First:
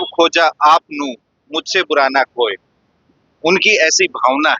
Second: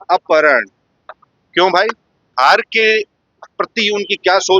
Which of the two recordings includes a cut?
second; 1 cut; at 2.3 s

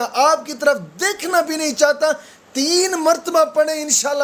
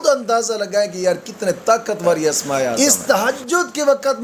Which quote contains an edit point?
second; 1 cut; at 2.7 s

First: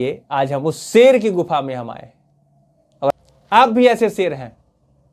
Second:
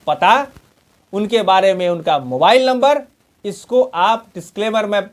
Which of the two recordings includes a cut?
first; 1 cut; at 3.1 s

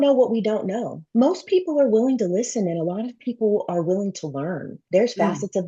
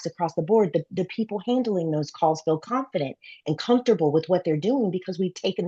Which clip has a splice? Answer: first; 2 cuts; at 0.9 s, 4.7 s

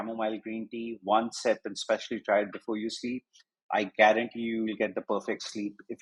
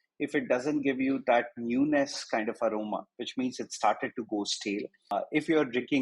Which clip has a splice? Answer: second; 1 cut; at 5.1 s

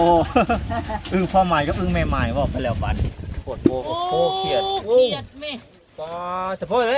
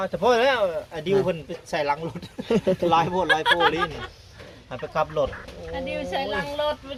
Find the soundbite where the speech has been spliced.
first; 1 cut; at 3.8 s

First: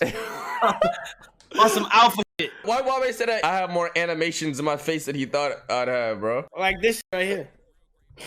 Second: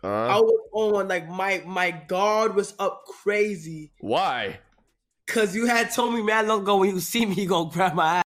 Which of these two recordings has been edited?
first; 3 cuts; at 2.6 s, 3.4 s, 6.5 s

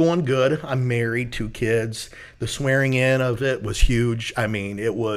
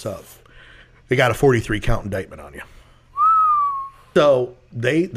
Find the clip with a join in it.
second; 1 cut; at 3.9 s

